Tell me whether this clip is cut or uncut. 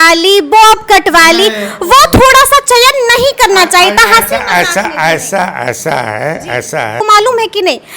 cut